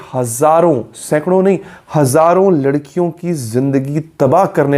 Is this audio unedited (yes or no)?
yes